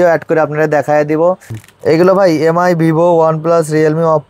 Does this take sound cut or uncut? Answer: cut